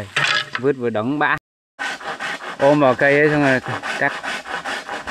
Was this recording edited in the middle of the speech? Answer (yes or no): yes